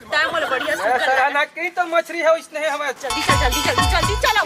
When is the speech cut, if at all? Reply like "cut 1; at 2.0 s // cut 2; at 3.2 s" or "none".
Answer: cut 1; at 3.0 s

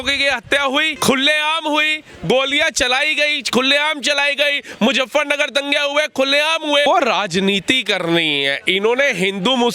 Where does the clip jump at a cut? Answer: cut 1; at 0.9 s // cut 2; at 6.9 s

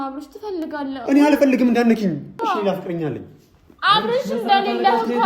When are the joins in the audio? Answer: cut 1; at 2.3 s

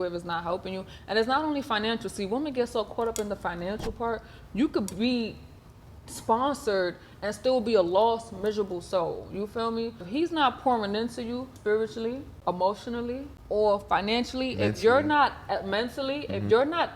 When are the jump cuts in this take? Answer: cut 1; at 10.1 s // cut 2; at 11.5 s // cut 3; at 12.3 s // cut 4; at 13.3 s

